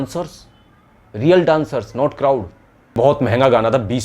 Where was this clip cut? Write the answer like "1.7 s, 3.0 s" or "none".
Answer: 2.9 s